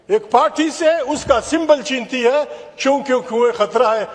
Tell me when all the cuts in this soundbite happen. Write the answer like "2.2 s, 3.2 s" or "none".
none